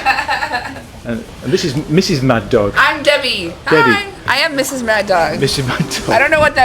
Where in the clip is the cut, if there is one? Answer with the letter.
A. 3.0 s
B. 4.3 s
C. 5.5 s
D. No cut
B